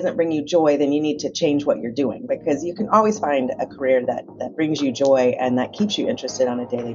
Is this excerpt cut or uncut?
uncut